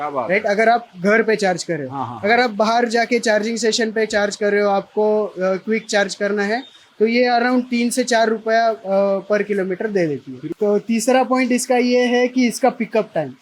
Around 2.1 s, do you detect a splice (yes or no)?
no